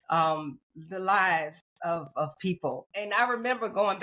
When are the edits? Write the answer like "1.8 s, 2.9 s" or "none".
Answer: 2.9 s